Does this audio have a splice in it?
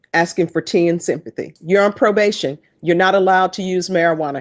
yes; 1 cut; at 1.5 s

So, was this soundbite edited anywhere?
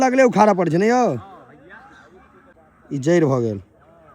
yes; 1 cut; at 2.6 s

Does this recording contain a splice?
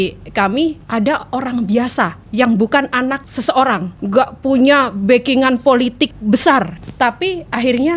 yes; 6 cuts; at 0.8 s, 2.2 s, 3.3 s, 3.9 s, 6.2 s, 6.8 s

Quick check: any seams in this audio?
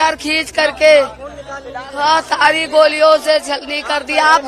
no; 0 cuts

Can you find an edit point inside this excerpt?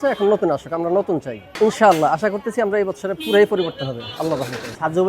no; 0 cuts

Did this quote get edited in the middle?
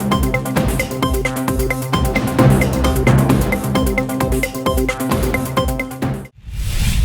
yes; 1 cut; at 6.1 s

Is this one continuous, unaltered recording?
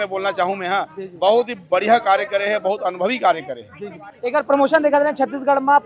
yes; 0 cuts

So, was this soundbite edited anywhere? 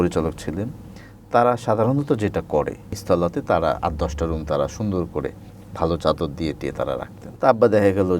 yes; 2 cuts; at 3.0 s, 7.2 s

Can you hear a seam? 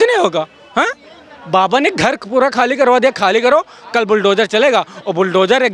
no; 0 cuts

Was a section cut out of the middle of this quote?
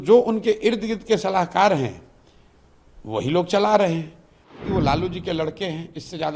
yes; 1 cut; at 4.6 s

